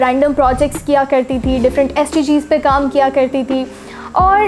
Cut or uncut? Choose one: uncut